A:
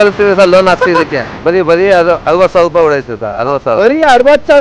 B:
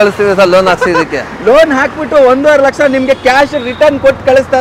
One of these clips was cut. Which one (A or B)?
A